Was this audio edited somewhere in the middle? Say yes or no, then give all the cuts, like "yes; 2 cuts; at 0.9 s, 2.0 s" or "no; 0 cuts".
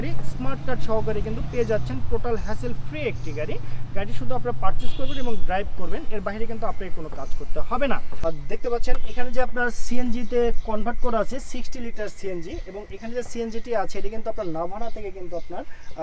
yes; 1 cut; at 8.2 s